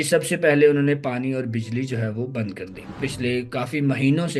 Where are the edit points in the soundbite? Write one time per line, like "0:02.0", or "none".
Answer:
0:03.0